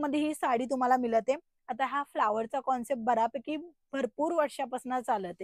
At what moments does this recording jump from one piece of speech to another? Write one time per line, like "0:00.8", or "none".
none